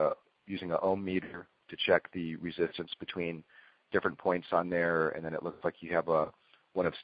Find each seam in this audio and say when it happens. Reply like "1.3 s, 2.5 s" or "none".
3.8 s